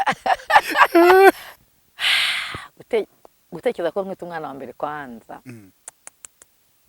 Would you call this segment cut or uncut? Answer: cut